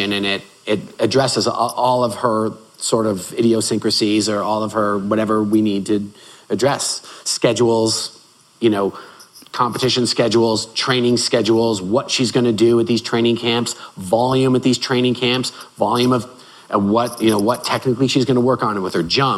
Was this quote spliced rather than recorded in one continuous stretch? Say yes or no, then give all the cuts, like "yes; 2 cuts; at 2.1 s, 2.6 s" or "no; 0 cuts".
no; 0 cuts